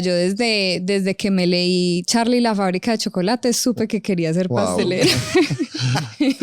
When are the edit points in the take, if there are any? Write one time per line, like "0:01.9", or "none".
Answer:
none